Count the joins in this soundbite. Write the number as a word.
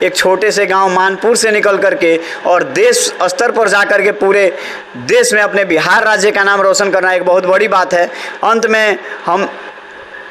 zero